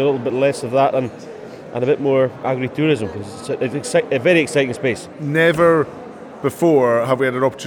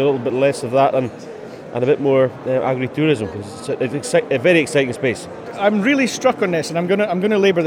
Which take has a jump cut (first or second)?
first